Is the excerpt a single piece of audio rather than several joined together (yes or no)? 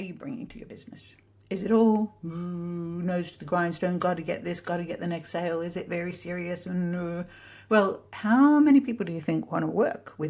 yes